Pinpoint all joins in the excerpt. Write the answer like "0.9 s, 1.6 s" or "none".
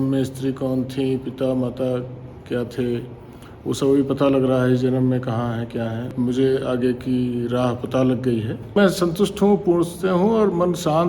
6.1 s, 8.8 s